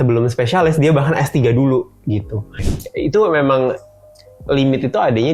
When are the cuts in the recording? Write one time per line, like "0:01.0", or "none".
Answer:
0:02.6